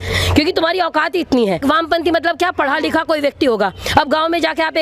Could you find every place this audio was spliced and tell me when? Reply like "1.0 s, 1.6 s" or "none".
1.6 s